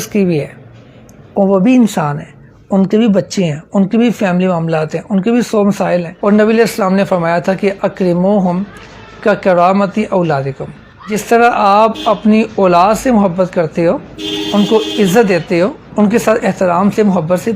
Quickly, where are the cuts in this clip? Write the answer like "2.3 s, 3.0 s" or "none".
6.1 s, 11.2 s, 15.8 s